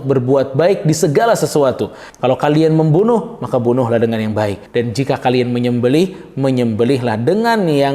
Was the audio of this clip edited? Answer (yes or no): yes